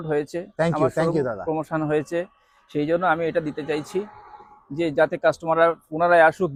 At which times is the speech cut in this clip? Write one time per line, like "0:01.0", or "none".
none